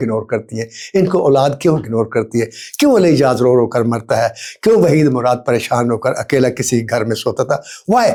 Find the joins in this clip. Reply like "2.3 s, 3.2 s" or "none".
none